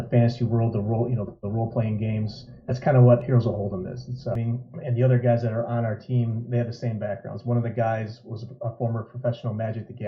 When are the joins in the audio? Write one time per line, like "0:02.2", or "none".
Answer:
0:04.4